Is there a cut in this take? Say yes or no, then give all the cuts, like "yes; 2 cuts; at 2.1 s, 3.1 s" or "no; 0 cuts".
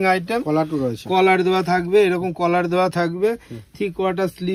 no; 0 cuts